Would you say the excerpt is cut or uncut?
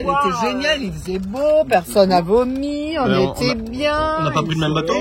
uncut